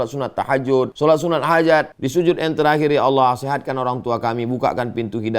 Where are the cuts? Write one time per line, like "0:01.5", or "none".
0:00.9
0:02.0